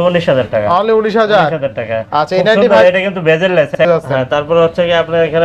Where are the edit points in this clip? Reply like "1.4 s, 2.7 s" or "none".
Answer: 3.8 s